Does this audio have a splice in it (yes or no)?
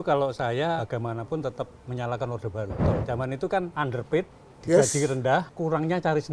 yes